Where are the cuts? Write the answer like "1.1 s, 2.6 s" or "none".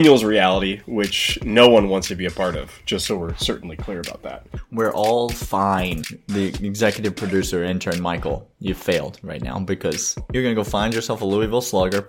4.3 s, 6.1 s, 10.2 s